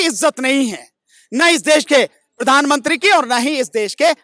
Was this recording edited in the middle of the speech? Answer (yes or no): no